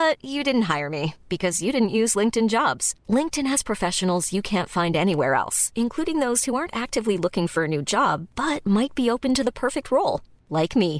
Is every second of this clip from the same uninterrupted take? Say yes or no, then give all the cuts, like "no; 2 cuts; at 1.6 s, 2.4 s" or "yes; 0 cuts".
yes; 0 cuts